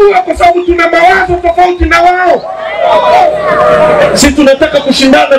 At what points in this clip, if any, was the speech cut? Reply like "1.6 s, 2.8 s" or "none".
none